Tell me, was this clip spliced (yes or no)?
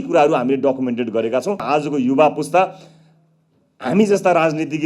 yes